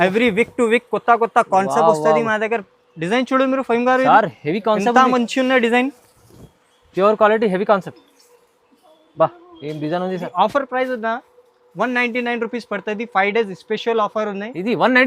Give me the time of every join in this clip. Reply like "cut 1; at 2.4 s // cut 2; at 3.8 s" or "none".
cut 1; at 10.2 s